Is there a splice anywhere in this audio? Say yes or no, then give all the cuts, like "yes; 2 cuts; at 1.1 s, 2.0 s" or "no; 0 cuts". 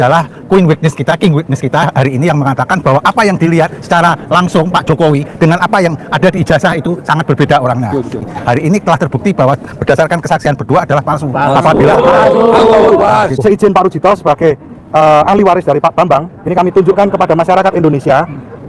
yes; 2 cuts; at 8.2 s, 13.4 s